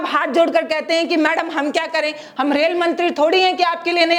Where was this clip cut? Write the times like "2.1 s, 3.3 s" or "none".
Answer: none